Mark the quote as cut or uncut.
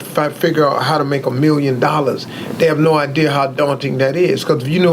uncut